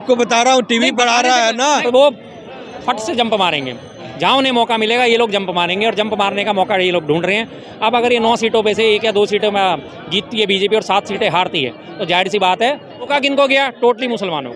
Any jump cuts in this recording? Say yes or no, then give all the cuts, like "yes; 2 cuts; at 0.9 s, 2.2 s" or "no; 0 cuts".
yes; 2 cuts; at 1.8 s, 13.1 s